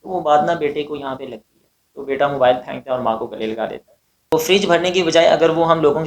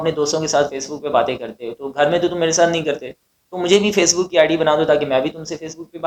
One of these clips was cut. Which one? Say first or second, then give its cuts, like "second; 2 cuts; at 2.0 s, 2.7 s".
first; 1 cut; at 4.3 s